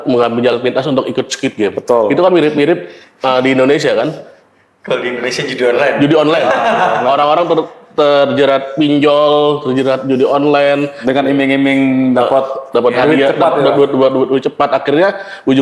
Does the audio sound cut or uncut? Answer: uncut